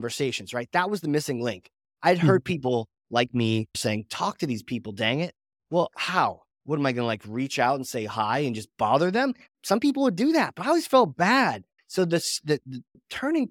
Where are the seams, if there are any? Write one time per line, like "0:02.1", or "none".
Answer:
0:03.8
0:11.7